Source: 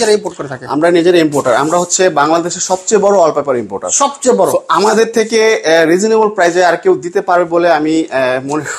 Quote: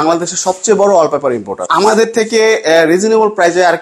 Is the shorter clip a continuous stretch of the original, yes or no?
no